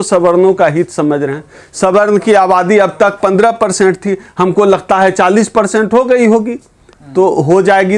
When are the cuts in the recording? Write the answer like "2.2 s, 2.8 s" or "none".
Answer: none